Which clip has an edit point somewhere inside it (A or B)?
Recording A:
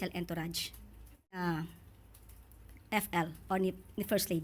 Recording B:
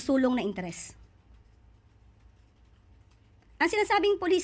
A